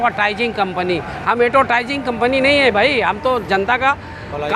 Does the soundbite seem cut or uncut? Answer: uncut